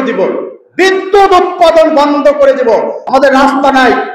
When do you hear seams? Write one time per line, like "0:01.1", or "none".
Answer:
0:03.0